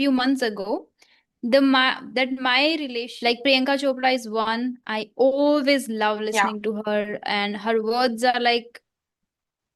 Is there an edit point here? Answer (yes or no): yes